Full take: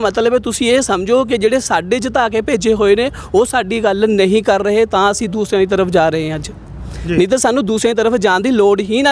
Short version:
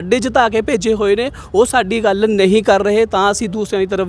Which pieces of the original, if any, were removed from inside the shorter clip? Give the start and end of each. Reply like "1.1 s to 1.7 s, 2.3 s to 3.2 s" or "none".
none